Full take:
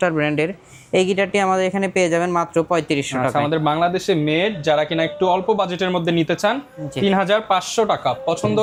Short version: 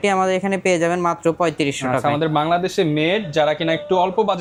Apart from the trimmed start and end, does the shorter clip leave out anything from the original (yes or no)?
no